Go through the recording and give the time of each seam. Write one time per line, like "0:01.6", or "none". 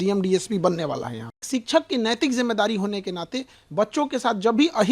0:01.4